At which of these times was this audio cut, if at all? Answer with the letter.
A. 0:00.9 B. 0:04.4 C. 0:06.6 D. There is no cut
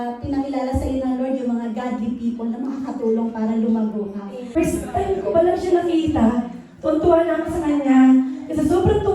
B